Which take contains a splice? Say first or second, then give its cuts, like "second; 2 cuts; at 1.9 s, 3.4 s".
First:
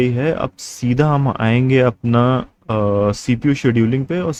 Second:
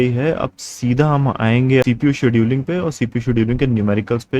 second; 1 cut; at 1.8 s